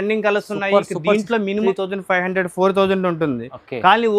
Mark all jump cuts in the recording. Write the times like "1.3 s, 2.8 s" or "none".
1.6 s